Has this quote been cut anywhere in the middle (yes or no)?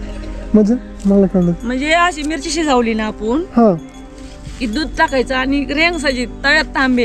no